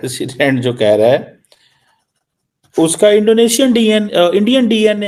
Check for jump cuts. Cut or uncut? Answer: uncut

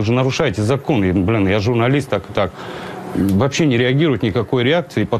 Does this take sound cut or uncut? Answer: cut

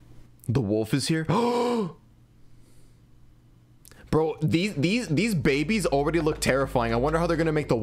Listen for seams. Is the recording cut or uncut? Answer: uncut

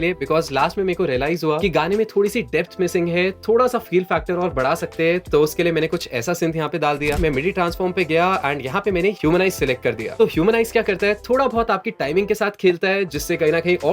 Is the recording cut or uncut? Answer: cut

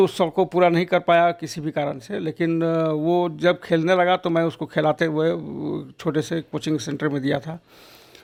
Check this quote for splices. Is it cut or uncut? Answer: uncut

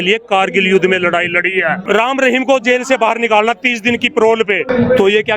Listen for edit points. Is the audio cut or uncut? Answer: cut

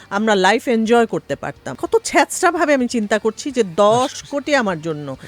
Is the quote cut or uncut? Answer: cut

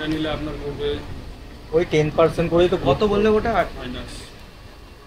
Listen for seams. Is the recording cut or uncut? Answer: uncut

